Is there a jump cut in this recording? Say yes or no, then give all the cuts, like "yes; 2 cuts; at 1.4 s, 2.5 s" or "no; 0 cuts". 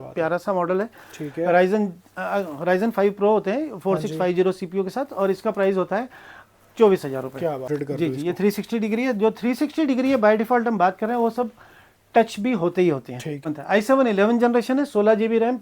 yes; 2 cuts; at 7.8 s, 13.4 s